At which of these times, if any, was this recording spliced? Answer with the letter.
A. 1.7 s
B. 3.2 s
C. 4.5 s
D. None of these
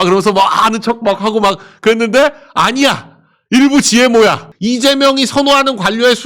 C